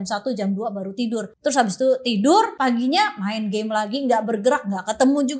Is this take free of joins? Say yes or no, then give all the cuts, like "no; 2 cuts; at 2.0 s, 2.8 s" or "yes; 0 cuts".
no; 2 cuts; at 1.3 s, 2.5 s